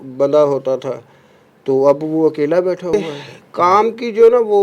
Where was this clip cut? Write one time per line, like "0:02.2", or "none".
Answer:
0:02.9